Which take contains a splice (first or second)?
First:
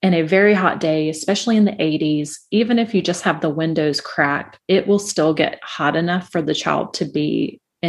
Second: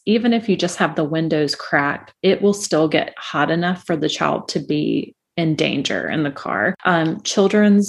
second